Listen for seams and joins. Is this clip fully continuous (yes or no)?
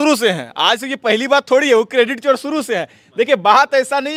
yes